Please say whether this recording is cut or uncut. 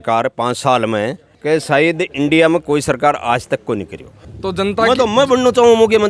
cut